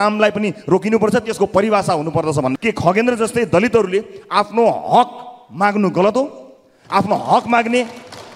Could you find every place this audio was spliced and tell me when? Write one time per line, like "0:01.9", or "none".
0:02.6